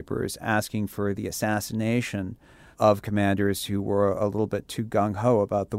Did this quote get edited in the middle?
yes; 1 cut; at 2.6 s

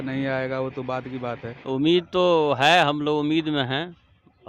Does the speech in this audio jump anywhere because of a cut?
yes; 1 cut; at 1.5 s

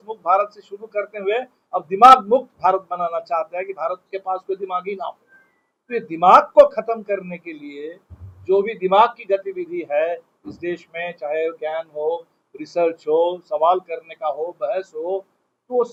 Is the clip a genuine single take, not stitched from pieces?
yes; 0 cuts

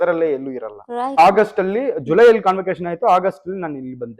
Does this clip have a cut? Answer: yes; 1 cut; at 1.2 s

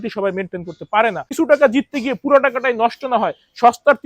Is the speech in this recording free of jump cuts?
no; 1 cut; at 1.4 s

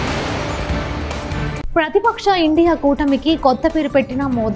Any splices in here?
yes; 1 cut; at 1.6 s

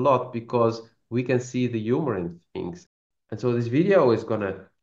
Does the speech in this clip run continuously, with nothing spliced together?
no; 1 cut; at 2.8 s

